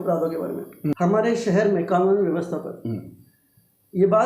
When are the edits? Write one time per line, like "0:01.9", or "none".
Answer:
0:00.9